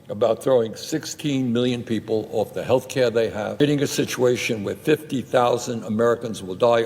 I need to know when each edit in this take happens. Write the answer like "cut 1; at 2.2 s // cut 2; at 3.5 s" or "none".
cut 1; at 3.6 s